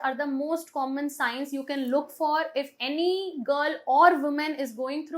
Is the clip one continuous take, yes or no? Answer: yes